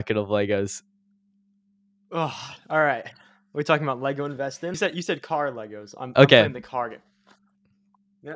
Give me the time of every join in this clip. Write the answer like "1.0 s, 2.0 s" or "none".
4.7 s